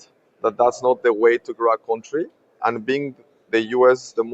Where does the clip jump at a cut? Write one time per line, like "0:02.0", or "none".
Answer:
0:02.6

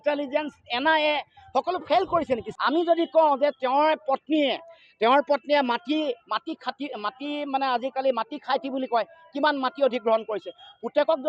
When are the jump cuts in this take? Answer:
0:02.5

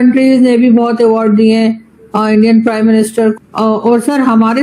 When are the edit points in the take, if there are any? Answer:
0:03.3

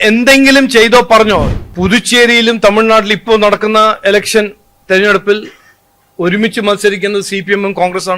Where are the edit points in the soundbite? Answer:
0:01.5

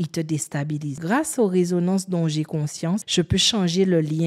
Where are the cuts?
0:01.0
0:03.1

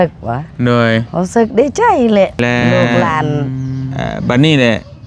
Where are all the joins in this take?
0:03.9

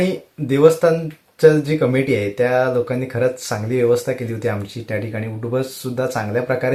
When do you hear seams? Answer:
none

